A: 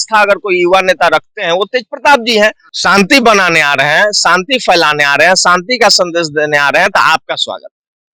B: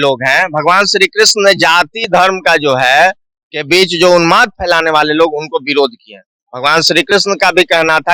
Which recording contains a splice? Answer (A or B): A